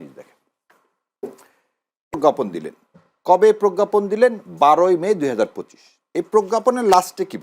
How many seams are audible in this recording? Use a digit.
1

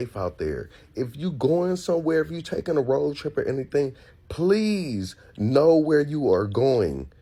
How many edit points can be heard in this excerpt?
0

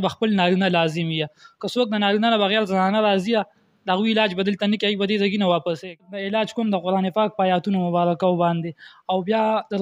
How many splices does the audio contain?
1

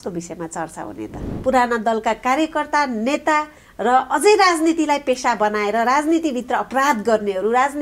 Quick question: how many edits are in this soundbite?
1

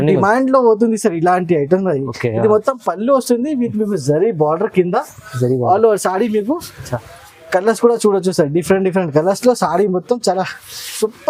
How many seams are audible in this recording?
0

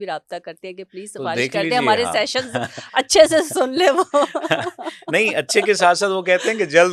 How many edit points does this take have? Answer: 0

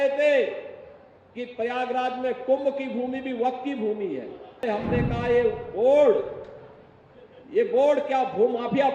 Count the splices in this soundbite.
1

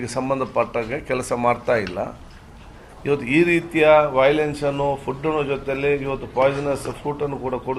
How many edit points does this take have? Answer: 0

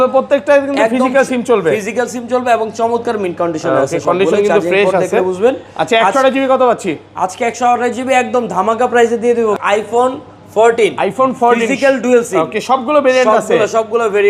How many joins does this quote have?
1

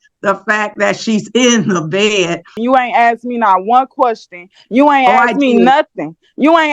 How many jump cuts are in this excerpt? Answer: 1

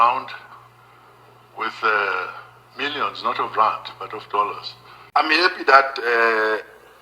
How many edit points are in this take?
1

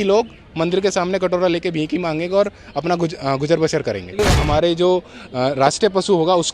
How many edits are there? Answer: 1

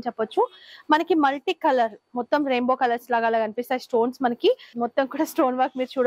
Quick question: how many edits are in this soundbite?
1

